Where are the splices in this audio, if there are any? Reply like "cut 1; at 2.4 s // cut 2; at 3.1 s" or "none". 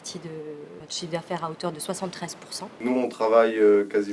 cut 1; at 0.8 s // cut 2; at 2.8 s